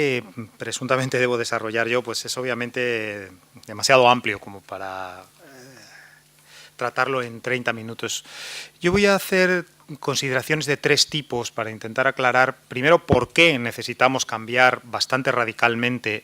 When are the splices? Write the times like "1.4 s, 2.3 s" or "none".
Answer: 6.9 s